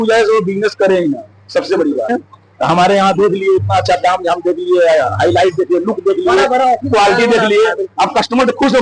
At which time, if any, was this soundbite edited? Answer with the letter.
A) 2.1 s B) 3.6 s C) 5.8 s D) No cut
A